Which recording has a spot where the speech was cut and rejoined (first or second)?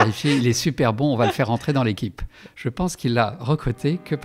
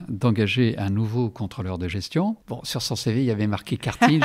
second